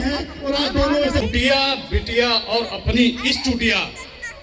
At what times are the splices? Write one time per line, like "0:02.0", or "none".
0:01.2